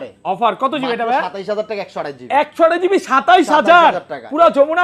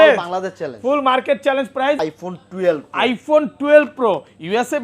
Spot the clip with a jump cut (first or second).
second